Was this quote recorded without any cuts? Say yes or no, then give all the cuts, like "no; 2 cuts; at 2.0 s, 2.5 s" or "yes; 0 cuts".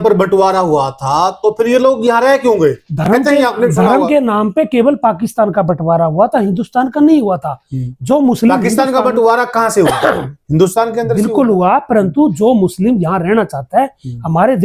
yes; 0 cuts